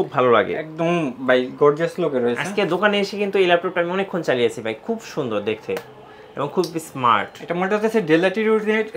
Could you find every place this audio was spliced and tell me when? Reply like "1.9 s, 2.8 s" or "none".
none